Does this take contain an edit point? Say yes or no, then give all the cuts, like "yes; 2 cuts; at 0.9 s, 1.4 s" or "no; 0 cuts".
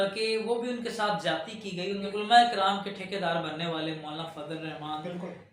yes; 1 cut; at 2.1 s